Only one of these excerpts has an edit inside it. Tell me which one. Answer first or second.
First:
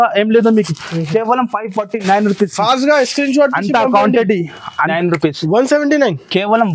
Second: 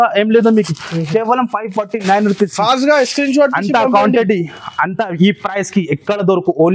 first